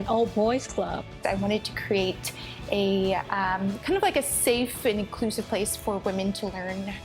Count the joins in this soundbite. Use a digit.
1